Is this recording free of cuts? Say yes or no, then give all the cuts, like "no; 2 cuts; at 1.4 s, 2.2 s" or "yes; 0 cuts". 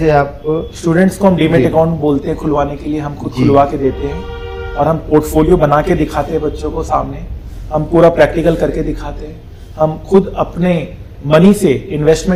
yes; 0 cuts